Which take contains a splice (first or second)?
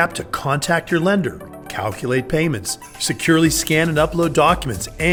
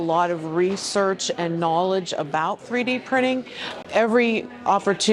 second